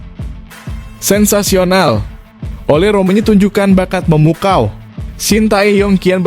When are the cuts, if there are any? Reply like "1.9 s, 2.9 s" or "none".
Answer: 1.0 s